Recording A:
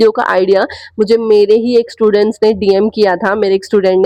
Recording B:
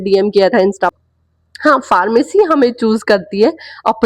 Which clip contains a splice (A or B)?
B